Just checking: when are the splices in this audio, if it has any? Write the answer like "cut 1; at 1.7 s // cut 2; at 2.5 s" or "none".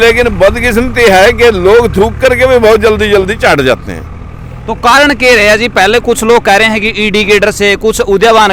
none